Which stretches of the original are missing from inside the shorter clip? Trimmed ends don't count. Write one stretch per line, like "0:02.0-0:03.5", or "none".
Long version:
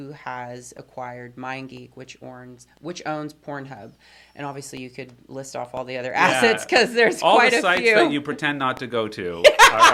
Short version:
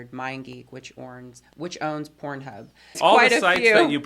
0:04.2-0:07.2